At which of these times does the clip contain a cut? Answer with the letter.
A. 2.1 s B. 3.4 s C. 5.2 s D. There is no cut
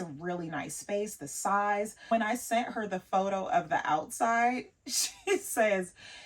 A